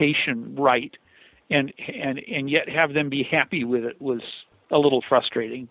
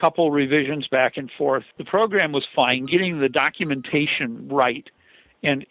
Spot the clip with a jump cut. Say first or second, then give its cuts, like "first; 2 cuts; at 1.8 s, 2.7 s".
second; 1 cut; at 1.7 s